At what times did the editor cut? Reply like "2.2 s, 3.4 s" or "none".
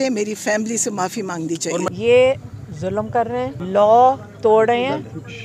1.9 s, 3.6 s